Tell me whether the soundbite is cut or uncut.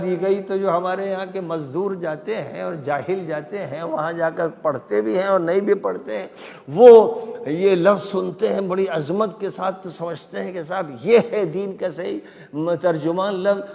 uncut